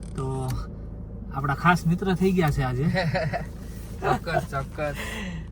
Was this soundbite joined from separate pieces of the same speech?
no; 0 cuts

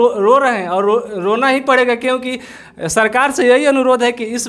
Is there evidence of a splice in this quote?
no; 0 cuts

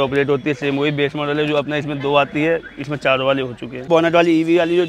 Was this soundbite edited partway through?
yes; 1 cut; at 3.9 s

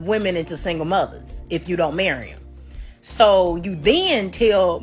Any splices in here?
yes; 1 cut; at 2.7 s

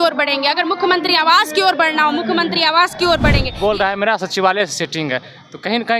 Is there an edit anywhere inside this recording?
yes; 1 cut; at 3.5 s

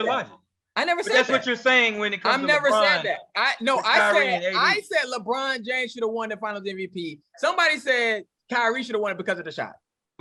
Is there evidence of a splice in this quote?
no; 0 cuts

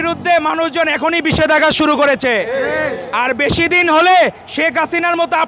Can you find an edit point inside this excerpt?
no; 0 cuts

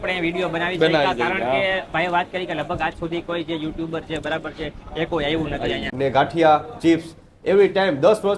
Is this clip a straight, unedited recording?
no; 1 cut; at 5.9 s

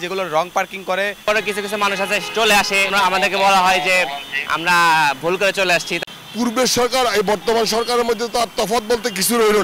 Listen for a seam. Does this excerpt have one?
yes; 3 cuts; at 1.2 s, 2.9 s, 5.9 s

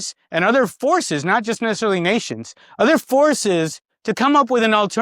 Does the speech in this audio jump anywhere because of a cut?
no; 0 cuts

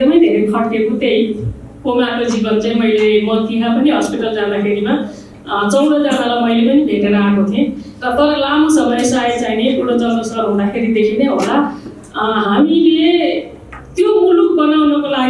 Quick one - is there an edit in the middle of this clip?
no; 0 cuts

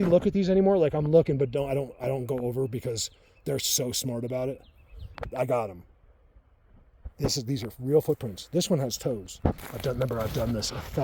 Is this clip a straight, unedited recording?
no; 1 cut; at 9.7 s

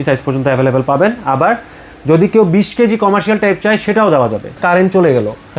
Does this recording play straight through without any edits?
no; 1 cut; at 4.6 s

